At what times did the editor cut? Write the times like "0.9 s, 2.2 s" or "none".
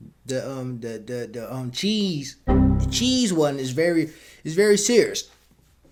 none